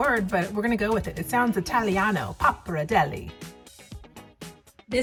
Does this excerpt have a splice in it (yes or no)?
no